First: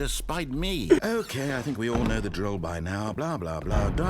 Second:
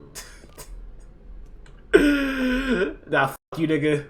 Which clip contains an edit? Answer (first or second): first